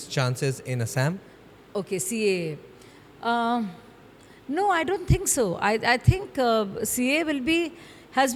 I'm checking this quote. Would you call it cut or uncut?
uncut